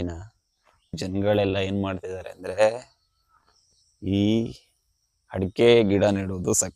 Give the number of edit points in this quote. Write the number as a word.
one